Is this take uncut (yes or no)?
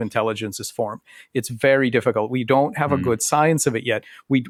yes